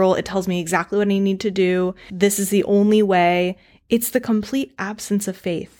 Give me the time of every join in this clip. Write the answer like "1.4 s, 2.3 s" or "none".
2.1 s